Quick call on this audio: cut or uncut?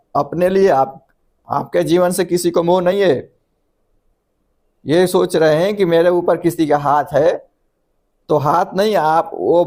uncut